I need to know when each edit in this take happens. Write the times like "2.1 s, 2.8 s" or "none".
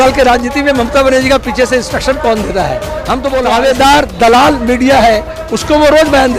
3.4 s